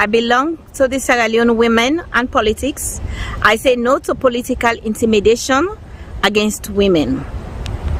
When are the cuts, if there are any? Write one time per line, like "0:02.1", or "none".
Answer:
none